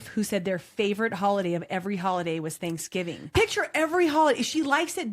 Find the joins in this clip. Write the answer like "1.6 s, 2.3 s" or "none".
3.3 s